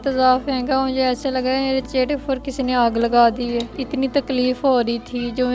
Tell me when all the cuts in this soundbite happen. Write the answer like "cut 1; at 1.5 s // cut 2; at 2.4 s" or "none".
cut 1; at 1.9 s // cut 2; at 3.8 s

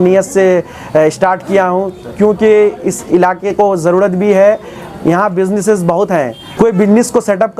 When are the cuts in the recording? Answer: cut 1; at 6.4 s

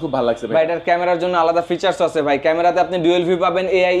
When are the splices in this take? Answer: none

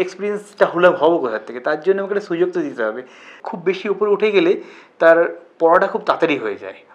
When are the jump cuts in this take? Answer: cut 1; at 3.3 s

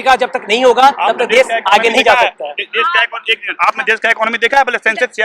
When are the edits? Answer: none

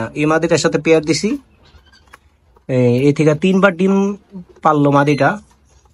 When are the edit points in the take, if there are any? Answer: none

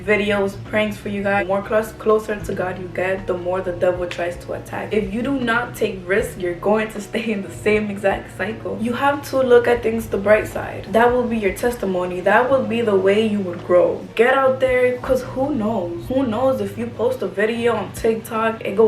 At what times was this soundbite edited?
cut 1; at 1.4 s // cut 2; at 4.8 s // cut 3; at 8.7 s // cut 4; at 14.0 s // cut 5; at 16.0 s

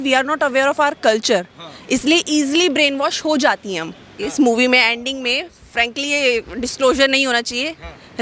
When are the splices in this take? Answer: cut 1; at 4.1 s

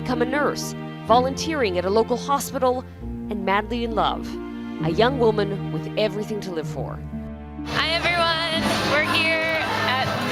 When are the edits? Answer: cut 1; at 6.1 s

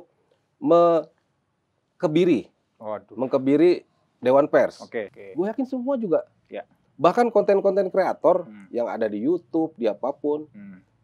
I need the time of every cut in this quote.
cut 1; at 5.2 s

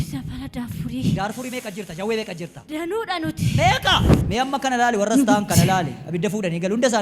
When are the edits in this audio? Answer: cut 1; at 2.6 s // cut 2; at 4.2 s

